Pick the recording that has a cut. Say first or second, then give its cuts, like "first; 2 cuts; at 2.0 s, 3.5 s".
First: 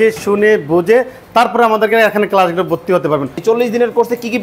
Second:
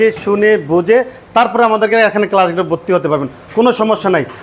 first; 1 cut; at 3.4 s